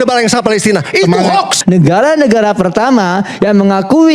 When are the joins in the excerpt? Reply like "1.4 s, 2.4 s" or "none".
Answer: 1.5 s